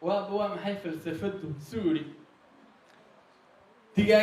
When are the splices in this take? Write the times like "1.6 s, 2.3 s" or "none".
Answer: none